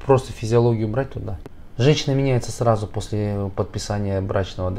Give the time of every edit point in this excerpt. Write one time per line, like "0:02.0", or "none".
0:01.4